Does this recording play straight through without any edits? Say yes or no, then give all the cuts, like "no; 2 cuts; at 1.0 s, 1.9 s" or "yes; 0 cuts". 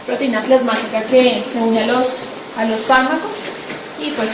no; 1 cut; at 2.2 s